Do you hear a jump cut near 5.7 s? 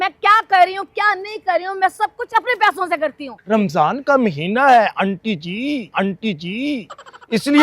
no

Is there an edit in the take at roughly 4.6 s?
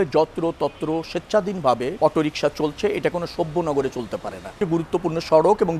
yes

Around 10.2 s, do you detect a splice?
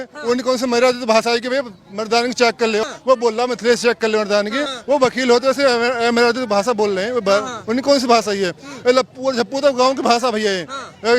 no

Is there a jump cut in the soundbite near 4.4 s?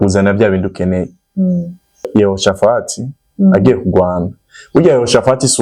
no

